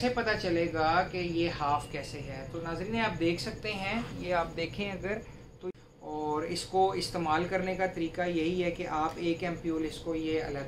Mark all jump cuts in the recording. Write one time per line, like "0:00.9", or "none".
0:05.7